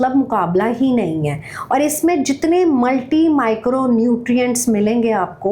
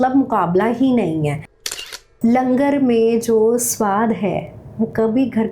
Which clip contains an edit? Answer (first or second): second